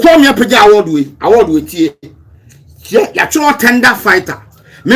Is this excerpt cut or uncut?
uncut